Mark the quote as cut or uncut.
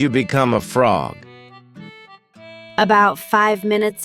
cut